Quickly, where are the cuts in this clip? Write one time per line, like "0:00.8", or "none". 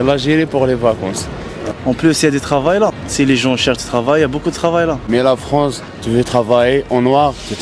0:01.5
0:03.0
0:05.0

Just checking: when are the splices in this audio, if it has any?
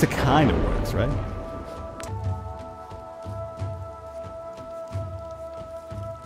0:02.0

